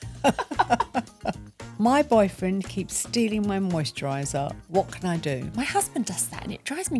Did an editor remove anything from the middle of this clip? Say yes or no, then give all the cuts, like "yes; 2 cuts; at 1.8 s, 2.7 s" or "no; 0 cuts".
yes; 2 cuts; at 1.2 s, 5.5 s